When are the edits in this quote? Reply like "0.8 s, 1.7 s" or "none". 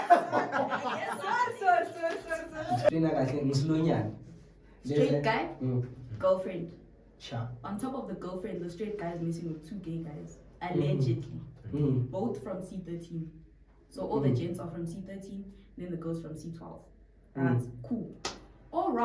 2.9 s